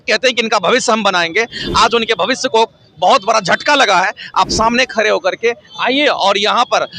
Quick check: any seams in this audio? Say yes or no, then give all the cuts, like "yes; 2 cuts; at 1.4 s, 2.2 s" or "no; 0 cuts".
no; 0 cuts